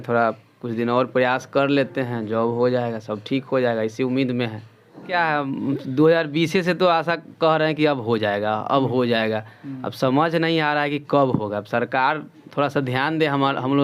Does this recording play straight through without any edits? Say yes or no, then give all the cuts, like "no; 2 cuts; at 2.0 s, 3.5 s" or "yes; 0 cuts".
no; 1 cut; at 5.1 s